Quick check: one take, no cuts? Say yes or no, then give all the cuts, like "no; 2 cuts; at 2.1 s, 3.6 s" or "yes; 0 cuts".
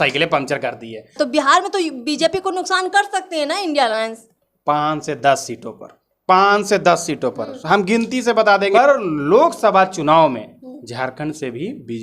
no; 2 cuts; at 1.2 s, 8.7 s